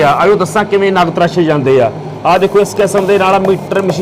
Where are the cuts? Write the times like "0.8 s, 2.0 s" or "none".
none